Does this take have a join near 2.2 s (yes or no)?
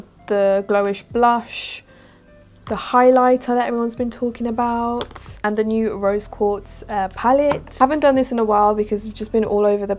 no